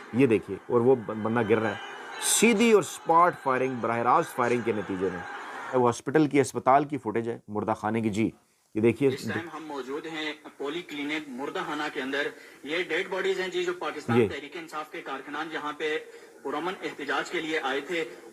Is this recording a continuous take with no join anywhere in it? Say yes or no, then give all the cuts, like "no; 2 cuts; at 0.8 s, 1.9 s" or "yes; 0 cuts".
yes; 0 cuts